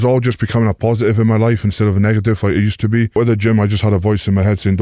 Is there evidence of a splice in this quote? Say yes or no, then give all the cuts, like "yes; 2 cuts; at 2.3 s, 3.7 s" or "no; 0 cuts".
yes; 1 cut; at 3.2 s